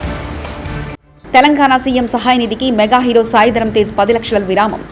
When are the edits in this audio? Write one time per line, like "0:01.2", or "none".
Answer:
none